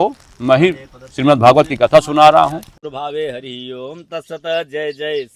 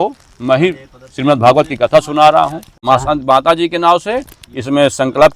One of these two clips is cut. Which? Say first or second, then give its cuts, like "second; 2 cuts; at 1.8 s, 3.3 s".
second; 1 cut; at 2.7 s